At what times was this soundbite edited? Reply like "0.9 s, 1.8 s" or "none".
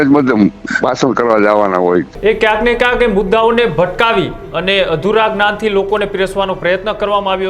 2.1 s